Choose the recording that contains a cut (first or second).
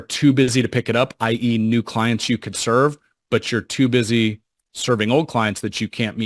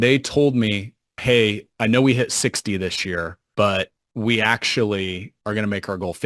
second